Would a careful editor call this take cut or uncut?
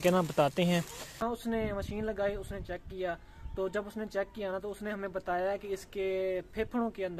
cut